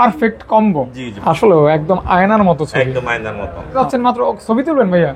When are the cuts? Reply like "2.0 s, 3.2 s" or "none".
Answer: 1.1 s, 3.8 s